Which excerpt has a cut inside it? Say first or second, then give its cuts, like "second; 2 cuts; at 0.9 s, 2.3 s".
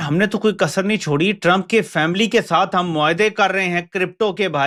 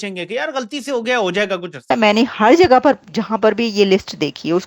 second; 1 cut; at 1.7 s